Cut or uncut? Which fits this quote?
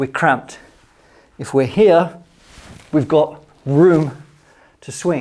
uncut